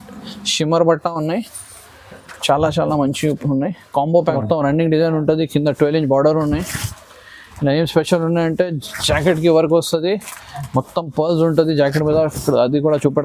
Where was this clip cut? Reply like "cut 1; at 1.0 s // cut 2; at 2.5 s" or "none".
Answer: cut 1; at 4.3 s